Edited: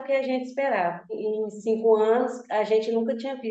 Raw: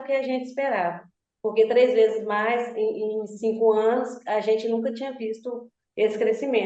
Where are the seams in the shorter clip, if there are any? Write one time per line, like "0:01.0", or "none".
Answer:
0:01.2